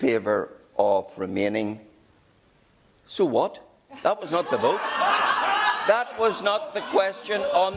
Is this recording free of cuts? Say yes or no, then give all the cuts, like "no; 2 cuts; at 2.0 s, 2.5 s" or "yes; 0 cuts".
yes; 0 cuts